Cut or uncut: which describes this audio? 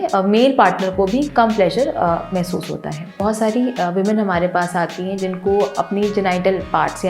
cut